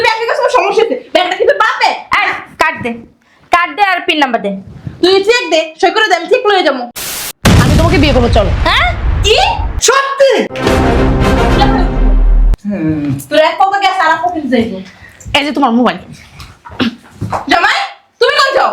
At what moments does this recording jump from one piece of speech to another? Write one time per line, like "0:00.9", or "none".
0:07.1